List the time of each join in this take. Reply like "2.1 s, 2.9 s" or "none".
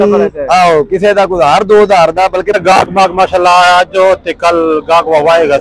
2.6 s

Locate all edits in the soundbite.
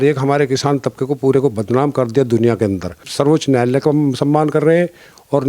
3.1 s

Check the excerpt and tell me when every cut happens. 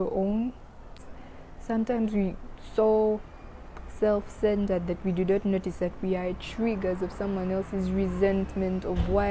1.0 s

